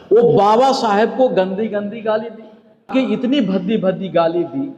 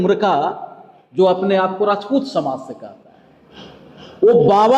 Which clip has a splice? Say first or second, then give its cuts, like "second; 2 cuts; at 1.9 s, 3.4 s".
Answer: first; 1 cut; at 2.9 s